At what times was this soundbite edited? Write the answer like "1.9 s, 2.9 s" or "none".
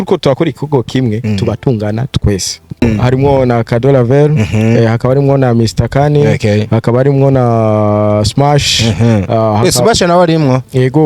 2.8 s